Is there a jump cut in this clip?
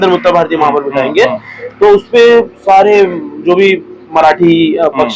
no; 0 cuts

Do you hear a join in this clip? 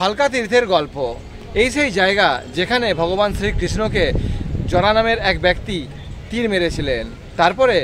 no; 0 cuts

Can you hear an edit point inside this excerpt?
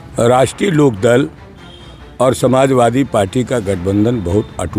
no; 0 cuts

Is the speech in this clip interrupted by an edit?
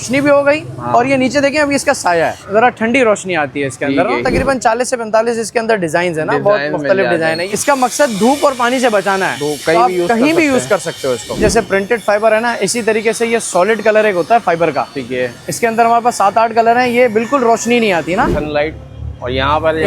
yes; 5 cuts; at 2.4 s, 4.2 s, 7.4 s, 11.4 s, 18.3 s

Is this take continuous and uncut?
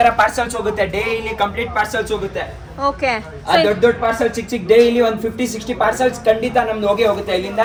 yes; 0 cuts

